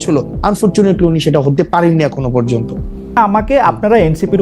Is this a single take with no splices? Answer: no; 1 cut; at 3.1 s

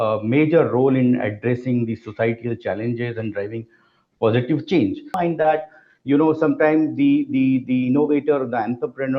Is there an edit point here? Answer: yes; 1 cut; at 5.1 s

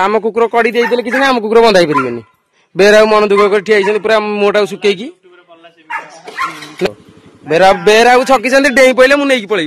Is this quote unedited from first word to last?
yes; 0 cuts

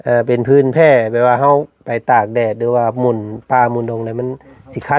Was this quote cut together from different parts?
no; 0 cuts

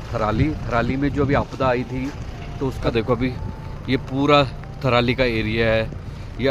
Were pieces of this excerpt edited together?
no; 0 cuts

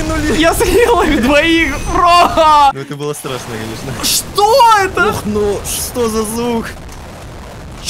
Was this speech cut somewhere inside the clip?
yes; 1 cut; at 2.8 s

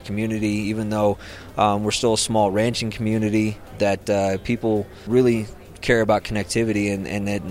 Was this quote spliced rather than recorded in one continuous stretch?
yes; 2 cuts; at 3.6 s, 5.0 s

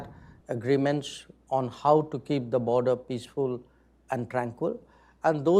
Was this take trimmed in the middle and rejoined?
no; 0 cuts

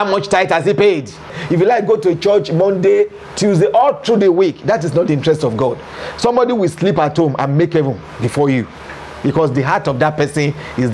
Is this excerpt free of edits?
no; 1 cut; at 1.3 s

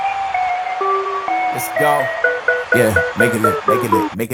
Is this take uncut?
yes; 0 cuts

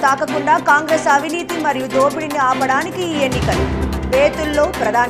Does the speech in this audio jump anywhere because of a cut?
no; 0 cuts

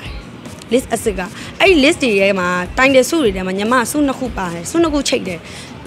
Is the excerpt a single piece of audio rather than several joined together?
yes; 0 cuts

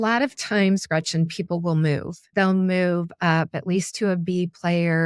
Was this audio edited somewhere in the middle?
no; 0 cuts

